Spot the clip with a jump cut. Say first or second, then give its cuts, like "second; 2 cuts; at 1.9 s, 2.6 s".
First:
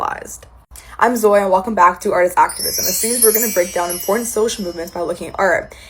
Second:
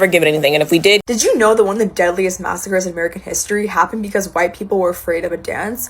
second; 1 cut; at 1.0 s